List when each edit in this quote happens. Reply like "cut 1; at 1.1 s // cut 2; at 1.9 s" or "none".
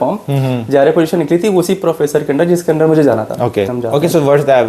cut 1; at 3.8 s

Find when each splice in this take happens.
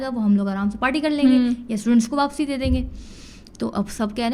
none

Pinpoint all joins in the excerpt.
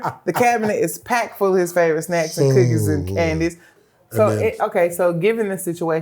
cut 1; at 3.7 s

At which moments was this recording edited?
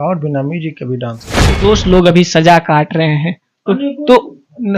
cut 1; at 1.5 s

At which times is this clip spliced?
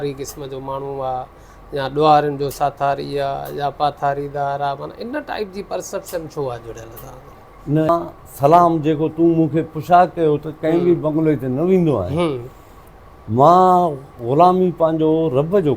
cut 1; at 7.9 s

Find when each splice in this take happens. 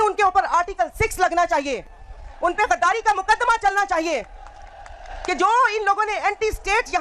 none

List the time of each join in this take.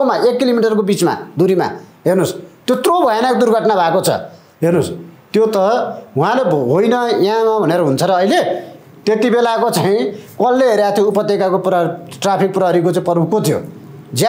none

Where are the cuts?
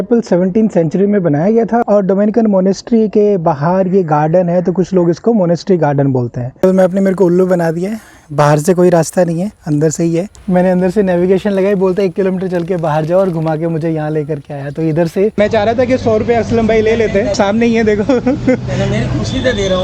cut 1; at 1.8 s // cut 2; at 6.4 s // cut 3; at 10.3 s // cut 4; at 15.4 s

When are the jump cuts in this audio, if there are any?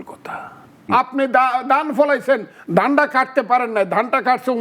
cut 1; at 0.9 s

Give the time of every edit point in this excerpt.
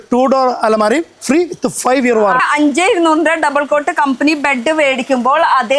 cut 1; at 2.4 s

